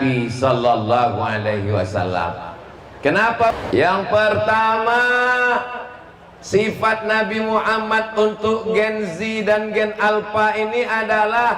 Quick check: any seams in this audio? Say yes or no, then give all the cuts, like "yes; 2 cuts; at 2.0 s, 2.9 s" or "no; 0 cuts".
yes; 1 cut; at 3.5 s